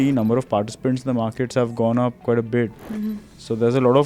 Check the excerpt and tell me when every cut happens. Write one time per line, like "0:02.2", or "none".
none